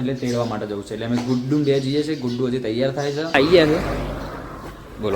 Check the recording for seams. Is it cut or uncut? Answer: cut